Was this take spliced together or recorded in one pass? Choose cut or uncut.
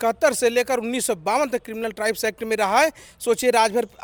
uncut